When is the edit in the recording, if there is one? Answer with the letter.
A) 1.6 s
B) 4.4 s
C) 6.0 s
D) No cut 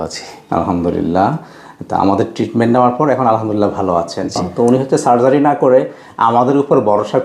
B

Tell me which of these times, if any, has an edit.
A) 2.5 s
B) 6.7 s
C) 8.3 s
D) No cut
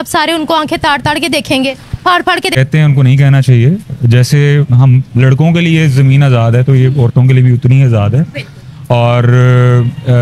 A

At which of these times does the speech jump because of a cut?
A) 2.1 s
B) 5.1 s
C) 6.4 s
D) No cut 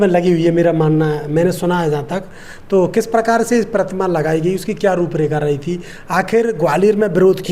D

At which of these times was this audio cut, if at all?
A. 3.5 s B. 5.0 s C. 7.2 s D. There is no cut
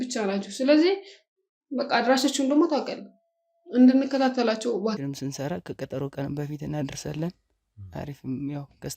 B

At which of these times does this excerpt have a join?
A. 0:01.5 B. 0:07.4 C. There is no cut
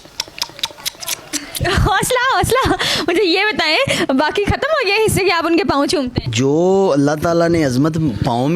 C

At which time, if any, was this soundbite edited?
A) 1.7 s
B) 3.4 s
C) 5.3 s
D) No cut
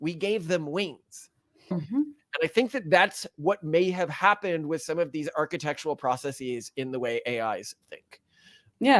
A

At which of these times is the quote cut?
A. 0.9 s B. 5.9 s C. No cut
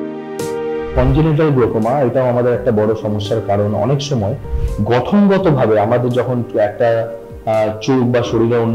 A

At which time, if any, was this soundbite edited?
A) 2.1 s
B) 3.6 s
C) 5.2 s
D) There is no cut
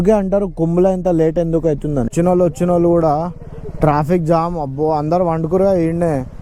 A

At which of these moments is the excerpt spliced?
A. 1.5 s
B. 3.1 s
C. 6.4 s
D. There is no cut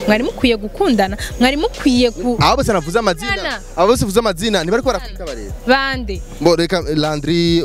D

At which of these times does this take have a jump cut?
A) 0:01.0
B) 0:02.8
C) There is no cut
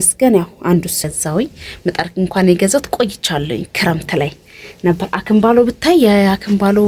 A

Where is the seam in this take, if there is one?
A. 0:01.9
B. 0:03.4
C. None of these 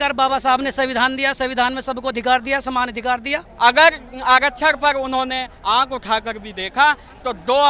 B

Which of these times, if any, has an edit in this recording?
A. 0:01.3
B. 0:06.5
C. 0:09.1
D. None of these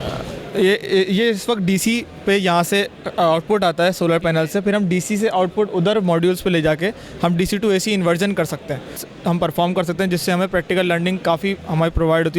C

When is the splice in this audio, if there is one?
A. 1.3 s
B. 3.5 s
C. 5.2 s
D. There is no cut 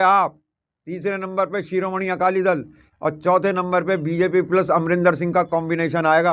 D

